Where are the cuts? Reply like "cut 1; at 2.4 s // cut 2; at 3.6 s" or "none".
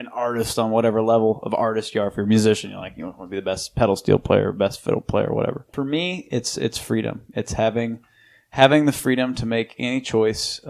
cut 1; at 5.8 s